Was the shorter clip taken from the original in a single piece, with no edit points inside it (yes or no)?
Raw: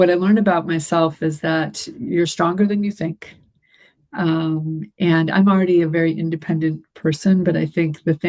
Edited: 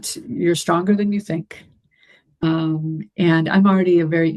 no